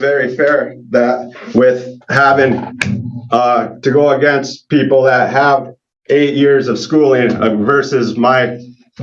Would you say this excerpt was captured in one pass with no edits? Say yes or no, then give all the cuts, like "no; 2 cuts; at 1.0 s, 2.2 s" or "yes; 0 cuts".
yes; 0 cuts